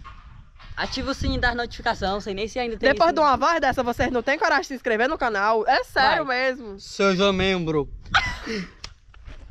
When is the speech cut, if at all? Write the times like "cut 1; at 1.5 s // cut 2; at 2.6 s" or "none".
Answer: none